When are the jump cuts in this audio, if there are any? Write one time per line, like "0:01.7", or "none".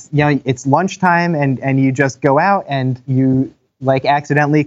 0:03.1